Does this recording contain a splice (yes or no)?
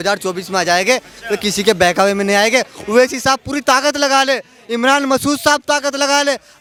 no